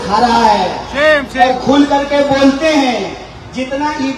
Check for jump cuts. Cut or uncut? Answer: uncut